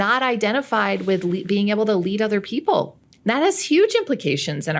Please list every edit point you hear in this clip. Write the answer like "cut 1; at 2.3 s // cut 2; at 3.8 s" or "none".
cut 1; at 3.0 s